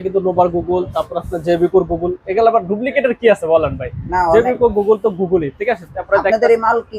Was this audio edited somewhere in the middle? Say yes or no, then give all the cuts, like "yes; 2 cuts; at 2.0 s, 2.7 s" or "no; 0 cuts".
no; 0 cuts